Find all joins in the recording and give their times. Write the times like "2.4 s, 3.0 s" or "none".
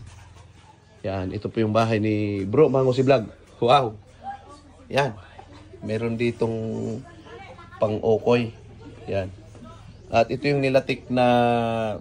none